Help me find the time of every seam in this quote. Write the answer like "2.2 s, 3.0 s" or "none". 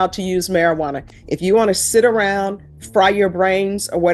none